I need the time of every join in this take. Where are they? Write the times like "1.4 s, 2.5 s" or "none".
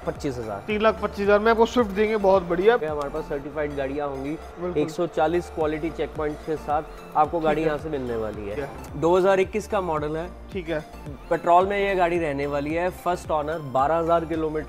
2.8 s, 8.6 s